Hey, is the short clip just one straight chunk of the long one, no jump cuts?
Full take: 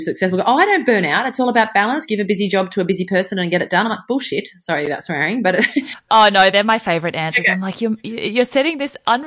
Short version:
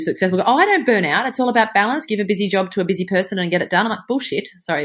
yes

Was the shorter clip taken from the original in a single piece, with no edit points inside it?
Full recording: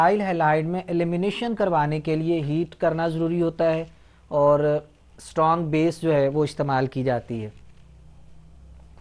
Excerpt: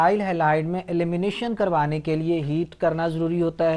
yes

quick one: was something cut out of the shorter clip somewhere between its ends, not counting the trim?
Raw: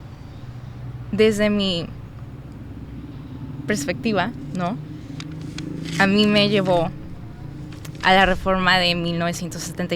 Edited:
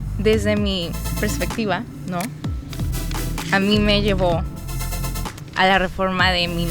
yes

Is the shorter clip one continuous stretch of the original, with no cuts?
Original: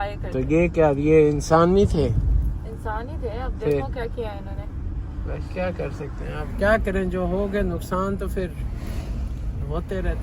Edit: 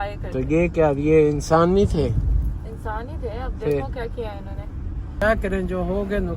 no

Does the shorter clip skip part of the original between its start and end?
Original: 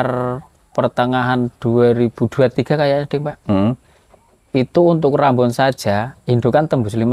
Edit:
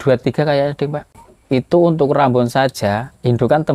yes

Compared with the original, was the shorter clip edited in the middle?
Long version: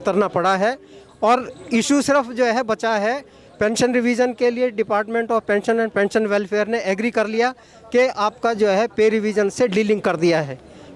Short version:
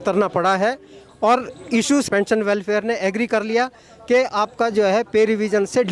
yes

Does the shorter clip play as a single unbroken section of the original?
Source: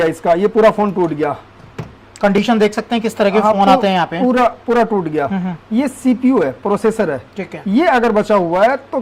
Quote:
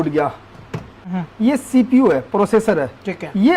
no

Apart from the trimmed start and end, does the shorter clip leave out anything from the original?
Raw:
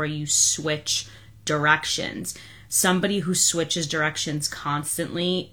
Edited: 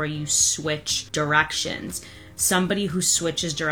yes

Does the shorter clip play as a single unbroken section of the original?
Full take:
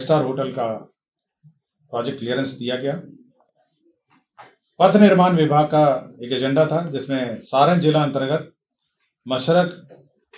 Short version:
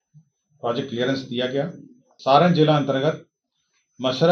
no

